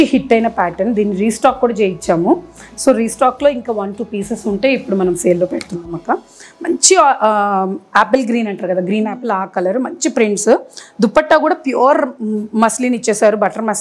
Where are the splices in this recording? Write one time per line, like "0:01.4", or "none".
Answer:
none